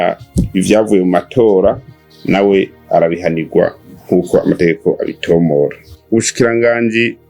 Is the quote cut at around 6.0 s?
yes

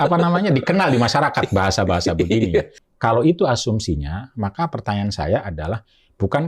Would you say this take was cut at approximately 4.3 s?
no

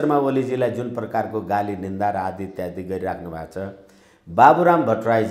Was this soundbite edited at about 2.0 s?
no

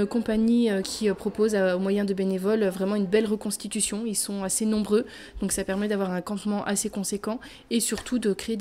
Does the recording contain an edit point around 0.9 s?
yes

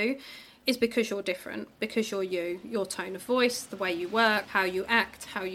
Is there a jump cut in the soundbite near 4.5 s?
yes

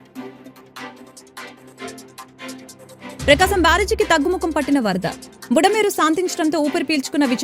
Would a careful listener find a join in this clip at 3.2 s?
yes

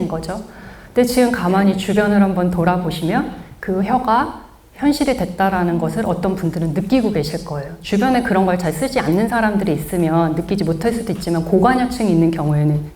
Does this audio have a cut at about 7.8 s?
no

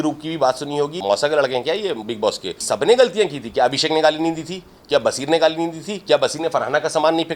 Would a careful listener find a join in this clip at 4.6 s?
no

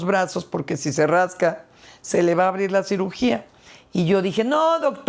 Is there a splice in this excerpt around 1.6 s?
no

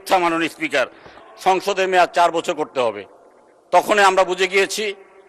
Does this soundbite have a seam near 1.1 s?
yes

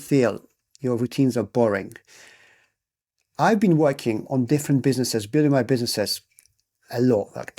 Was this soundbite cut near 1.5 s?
no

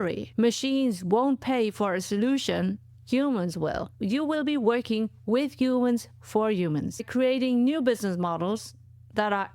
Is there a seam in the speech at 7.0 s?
yes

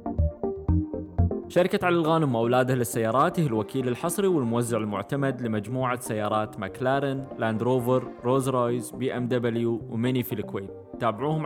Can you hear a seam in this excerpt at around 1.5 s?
yes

